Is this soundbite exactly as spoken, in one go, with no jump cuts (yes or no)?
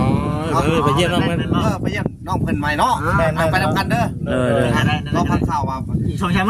yes